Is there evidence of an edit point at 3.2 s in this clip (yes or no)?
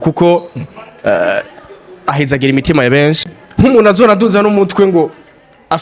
yes